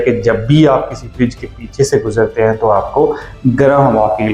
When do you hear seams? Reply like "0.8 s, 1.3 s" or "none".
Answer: none